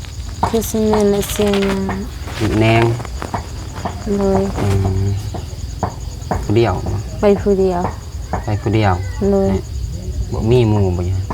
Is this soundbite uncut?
no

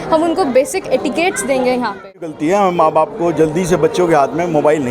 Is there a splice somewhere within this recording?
yes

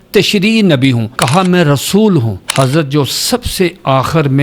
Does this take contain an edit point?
yes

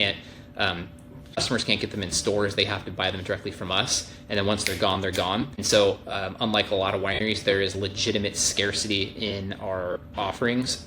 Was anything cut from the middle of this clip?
yes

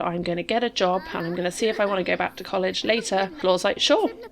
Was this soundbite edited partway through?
yes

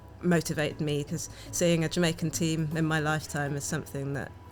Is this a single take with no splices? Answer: no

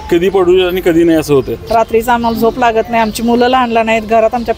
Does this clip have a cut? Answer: yes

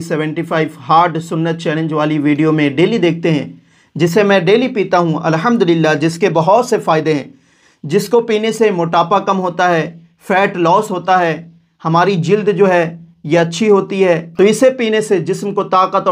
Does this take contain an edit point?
yes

